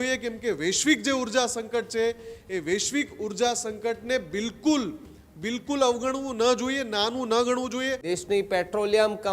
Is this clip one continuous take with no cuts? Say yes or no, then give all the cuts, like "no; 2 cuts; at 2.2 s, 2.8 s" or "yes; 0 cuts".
no; 1 cut; at 8.0 s